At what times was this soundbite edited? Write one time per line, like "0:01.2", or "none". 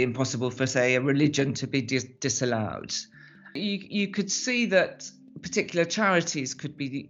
0:03.6

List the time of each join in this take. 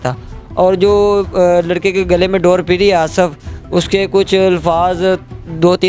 none

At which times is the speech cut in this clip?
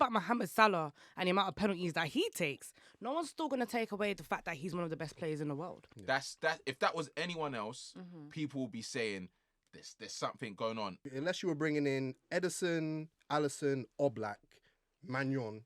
0:05.9
0:11.0

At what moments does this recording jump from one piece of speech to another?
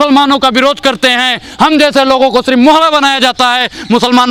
none

